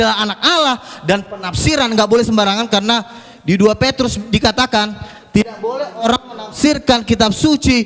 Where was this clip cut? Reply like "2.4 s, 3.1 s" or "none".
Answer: none